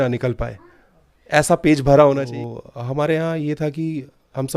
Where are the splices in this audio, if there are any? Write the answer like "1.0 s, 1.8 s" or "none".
2.2 s